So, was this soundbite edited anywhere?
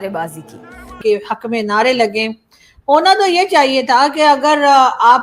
yes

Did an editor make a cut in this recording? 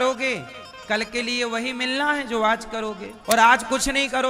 yes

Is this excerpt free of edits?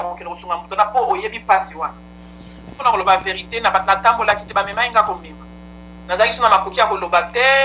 no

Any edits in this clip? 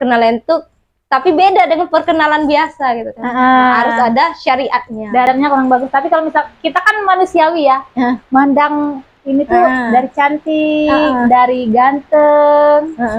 yes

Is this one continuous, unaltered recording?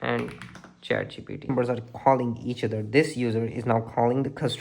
no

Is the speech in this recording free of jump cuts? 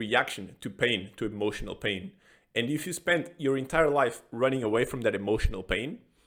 yes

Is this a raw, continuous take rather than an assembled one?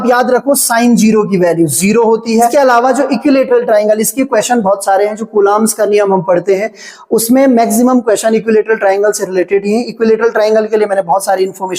no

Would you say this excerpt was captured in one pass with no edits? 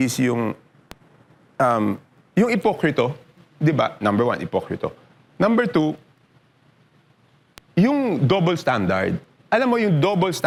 yes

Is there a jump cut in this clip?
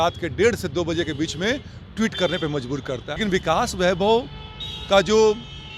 yes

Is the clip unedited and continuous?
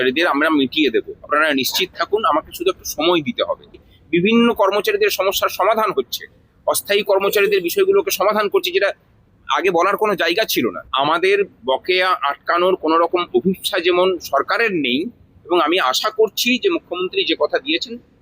no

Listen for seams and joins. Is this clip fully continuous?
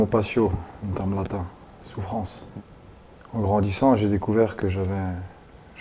no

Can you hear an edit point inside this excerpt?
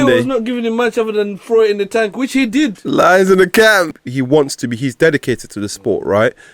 yes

